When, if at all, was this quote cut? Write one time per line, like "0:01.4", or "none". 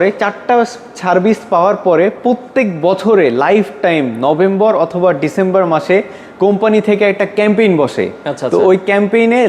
none